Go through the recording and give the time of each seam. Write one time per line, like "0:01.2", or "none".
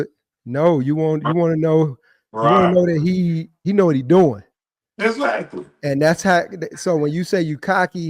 0:03.5